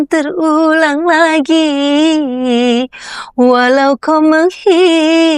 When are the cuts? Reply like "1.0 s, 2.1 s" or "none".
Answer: none